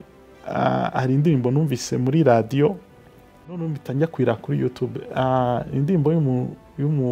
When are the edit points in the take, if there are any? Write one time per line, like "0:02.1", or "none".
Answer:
0:03.5